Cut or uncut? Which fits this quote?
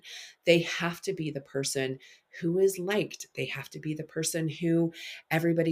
uncut